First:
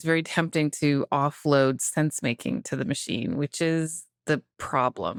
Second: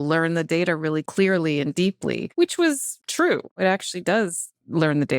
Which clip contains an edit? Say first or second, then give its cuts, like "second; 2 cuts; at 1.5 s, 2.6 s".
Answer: second; 3 cuts; at 1.1 s, 2.2 s, 3.4 s